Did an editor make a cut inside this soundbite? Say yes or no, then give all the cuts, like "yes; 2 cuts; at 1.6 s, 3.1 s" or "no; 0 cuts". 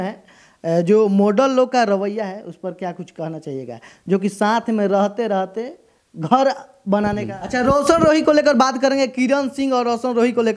yes; 1 cut; at 7.4 s